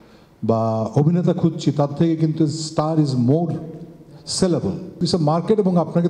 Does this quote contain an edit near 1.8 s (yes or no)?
no